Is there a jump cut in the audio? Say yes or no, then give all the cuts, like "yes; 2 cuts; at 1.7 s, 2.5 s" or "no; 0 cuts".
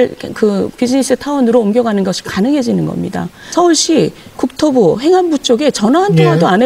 yes; 1 cut; at 3.5 s